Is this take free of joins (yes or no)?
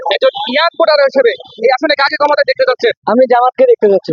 yes